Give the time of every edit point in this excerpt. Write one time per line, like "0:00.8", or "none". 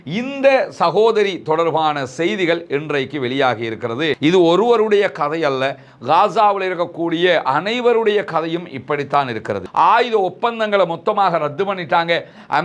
0:04.2
0:09.6